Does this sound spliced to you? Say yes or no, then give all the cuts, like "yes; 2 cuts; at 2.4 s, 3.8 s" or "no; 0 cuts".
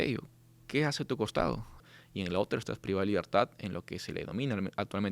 yes; 1 cut; at 1.9 s